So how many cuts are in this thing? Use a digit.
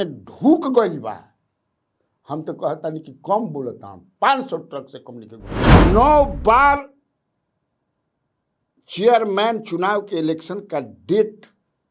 1